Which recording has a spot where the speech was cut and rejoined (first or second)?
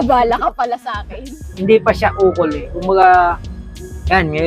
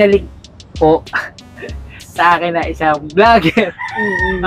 first